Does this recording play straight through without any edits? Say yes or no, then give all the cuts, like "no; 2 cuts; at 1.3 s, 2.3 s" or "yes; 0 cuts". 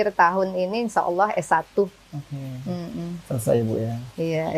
yes; 0 cuts